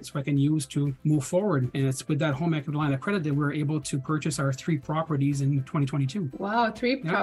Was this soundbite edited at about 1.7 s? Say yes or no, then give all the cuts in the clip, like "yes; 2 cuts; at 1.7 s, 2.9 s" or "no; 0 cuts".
yes; 3 cuts; at 1.0 s, 1.7 s, 6.3 s